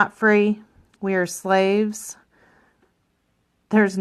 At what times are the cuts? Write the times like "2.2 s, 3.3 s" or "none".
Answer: 2.8 s